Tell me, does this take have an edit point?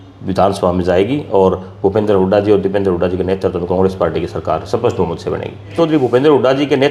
yes; 1 cut; at 5.7 s

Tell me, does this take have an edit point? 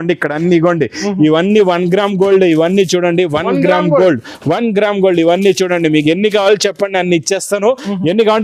no; 0 cuts

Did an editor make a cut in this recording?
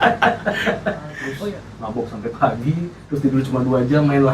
yes; 1 cut; at 1.2 s

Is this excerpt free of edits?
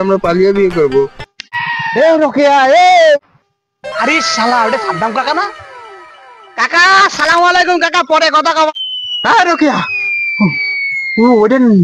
no; 3 cuts; at 1.5 s, 3.3 s, 8.7 s

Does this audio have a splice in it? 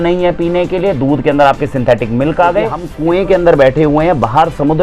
yes; 1 cut; at 2.9 s

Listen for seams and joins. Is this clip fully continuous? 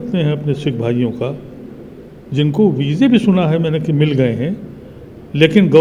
yes; 0 cuts

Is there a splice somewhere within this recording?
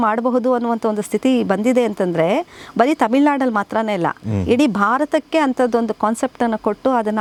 no; 0 cuts

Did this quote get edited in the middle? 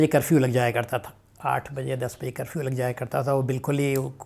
no; 0 cuts

